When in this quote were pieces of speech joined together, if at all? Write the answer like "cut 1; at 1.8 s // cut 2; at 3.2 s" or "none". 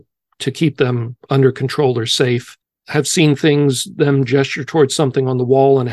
cut 1; at 2.6 s